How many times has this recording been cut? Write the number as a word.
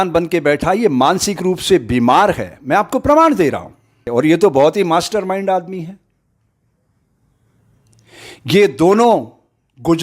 one